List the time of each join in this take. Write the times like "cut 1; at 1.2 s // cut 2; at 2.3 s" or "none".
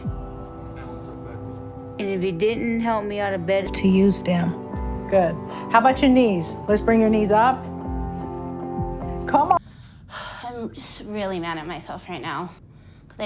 cut 1; at 3.7 s // cut 2; at 9.6 s